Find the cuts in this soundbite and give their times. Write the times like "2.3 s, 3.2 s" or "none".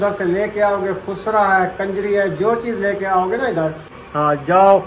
3.9 s